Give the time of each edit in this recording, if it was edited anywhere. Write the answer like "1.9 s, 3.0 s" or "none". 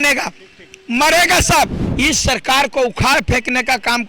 1.8 s